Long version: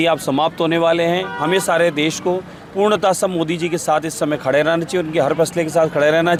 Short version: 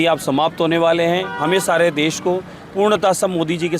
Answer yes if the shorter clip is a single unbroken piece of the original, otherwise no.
yes